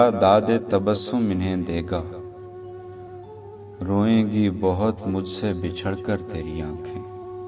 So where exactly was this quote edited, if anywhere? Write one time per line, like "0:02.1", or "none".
none